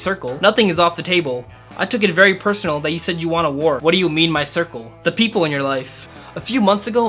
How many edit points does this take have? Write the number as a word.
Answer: two